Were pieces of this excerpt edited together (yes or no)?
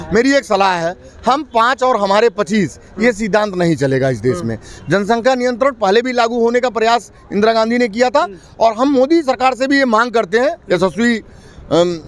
no